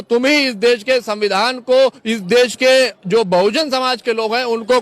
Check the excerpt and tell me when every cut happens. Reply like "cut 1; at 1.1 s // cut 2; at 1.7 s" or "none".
none